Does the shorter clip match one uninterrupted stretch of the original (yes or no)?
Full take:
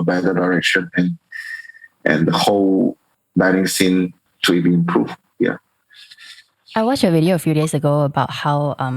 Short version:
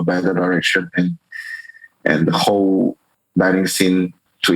yes